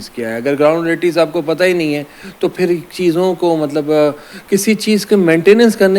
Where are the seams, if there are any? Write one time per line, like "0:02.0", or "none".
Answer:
none